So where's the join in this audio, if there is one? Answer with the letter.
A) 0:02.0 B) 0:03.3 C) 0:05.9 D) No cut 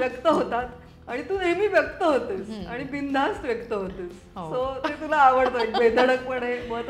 D